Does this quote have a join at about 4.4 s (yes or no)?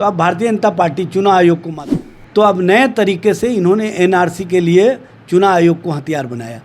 no